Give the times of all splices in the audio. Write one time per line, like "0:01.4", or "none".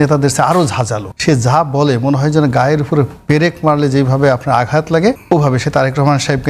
0:01.0
0:05.2